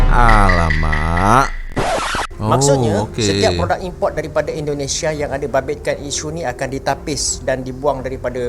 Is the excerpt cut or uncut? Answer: cut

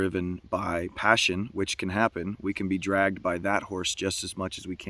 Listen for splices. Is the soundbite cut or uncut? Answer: uncut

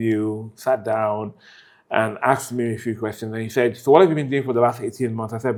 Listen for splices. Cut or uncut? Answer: uncut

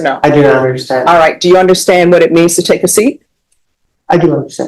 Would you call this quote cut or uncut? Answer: uncut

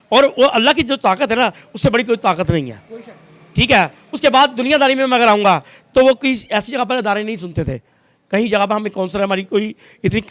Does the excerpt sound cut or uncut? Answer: uncut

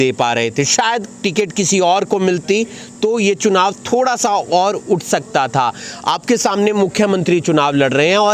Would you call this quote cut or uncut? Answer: uncut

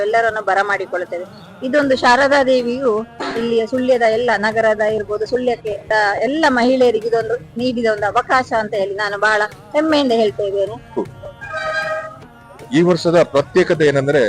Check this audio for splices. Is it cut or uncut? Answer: cut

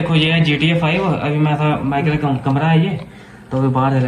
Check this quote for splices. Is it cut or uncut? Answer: uncut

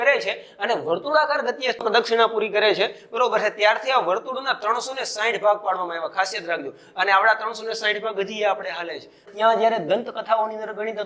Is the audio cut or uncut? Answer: cut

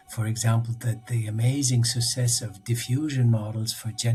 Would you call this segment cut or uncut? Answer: uncut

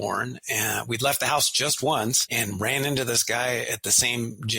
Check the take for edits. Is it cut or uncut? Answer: cut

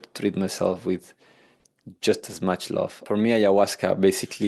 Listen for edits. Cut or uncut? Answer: cut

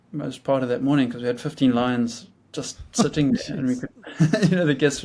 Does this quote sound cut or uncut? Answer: uncut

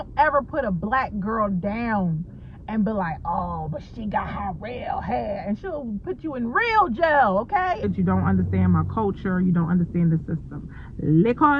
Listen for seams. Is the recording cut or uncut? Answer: cut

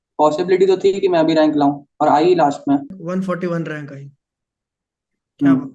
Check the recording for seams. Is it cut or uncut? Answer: uncut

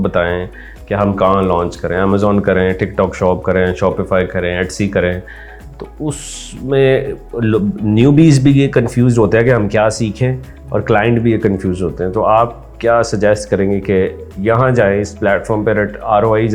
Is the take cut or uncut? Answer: uncut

